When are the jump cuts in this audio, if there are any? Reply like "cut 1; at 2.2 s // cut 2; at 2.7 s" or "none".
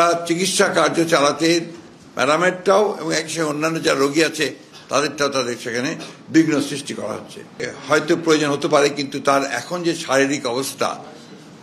cut 1; at 7.7 s